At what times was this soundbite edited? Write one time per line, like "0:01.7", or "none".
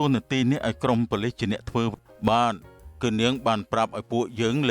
0:01.9